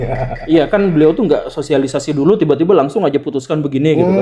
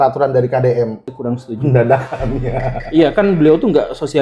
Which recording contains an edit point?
second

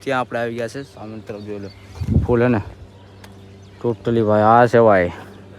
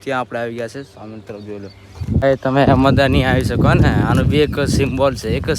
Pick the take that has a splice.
second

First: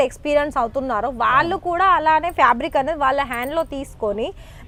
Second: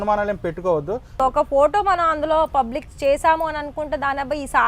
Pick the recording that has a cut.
second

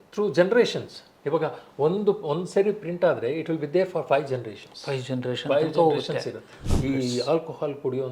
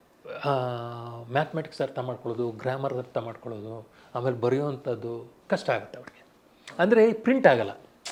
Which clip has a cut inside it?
first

